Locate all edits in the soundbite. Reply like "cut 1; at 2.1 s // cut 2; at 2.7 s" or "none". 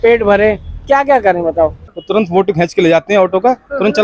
cut 1; at 1.9 s